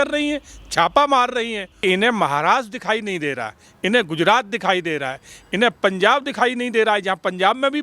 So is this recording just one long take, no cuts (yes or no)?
no